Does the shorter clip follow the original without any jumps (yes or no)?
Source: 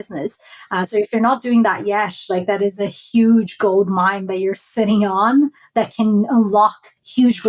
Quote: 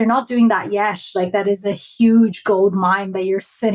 yes